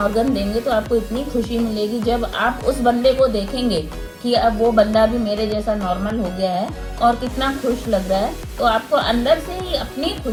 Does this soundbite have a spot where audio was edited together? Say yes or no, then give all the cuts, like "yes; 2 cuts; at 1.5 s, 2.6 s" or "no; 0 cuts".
no; 0 cuts